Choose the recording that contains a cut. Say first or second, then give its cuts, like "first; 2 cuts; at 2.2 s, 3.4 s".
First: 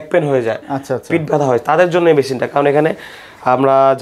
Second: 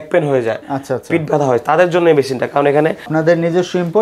second; 1 cut; at 3.1 s